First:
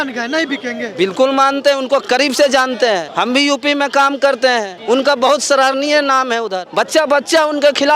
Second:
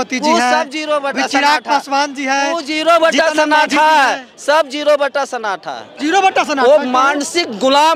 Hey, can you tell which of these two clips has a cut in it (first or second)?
first